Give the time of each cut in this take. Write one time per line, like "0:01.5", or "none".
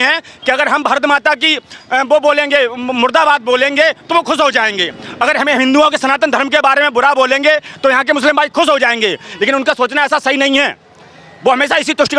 none